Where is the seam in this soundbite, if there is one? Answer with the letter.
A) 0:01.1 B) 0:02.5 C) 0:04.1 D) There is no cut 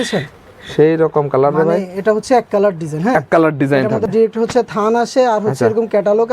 C